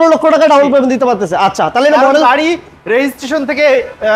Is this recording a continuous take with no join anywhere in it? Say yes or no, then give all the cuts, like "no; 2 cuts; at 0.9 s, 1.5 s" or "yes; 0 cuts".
yes; 0 cuts